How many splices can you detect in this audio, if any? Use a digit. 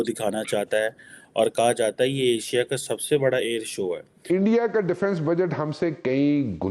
1